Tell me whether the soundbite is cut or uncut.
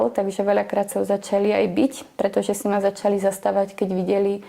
uncut